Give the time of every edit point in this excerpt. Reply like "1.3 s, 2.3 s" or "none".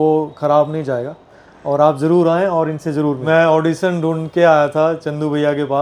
3.2 s